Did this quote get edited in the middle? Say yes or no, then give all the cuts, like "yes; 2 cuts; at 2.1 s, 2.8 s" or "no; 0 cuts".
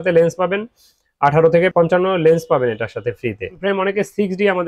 yes; 2 cuts; at 1.7 s, 3.5 s